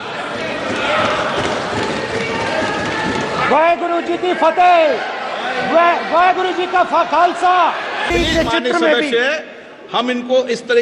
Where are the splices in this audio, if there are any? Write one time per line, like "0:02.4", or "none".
0:08.0